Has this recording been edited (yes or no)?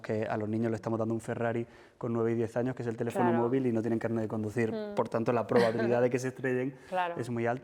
no